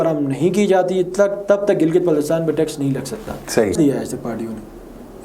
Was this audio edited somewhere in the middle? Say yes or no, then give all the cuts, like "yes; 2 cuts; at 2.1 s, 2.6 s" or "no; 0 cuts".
yes; 1 cut; at 3.8 s